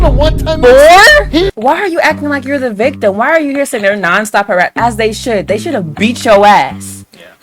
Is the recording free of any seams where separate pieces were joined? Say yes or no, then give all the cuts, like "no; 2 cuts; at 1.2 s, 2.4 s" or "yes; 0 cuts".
no; 1 cut; at 1.5 s